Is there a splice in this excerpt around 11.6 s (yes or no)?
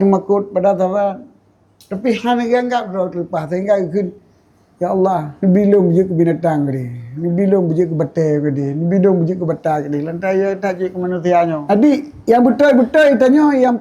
yes